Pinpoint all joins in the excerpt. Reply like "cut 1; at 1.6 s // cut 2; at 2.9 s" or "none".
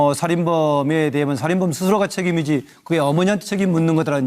cut 1; at 1.6 s

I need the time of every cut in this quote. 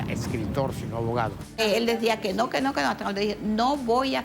cut 1; at 1.6 s

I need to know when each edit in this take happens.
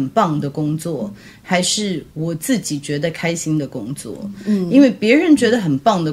none

